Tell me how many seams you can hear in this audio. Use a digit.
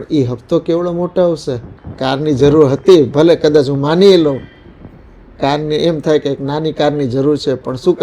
1